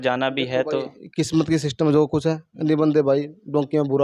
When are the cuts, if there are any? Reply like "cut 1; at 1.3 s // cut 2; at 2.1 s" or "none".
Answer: cut 1; at 0.9 s